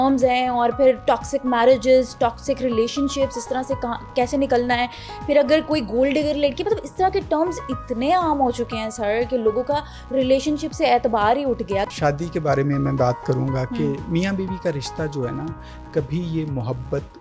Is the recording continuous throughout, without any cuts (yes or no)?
no